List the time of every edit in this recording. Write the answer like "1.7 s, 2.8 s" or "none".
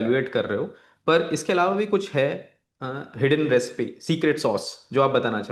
none